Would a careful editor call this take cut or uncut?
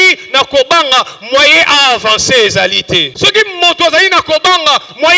cut